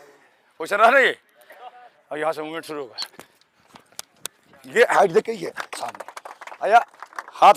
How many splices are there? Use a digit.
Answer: 0